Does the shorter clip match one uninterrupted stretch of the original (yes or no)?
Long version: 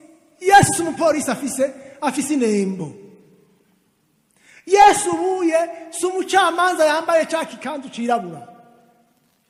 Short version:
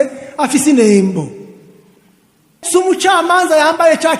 no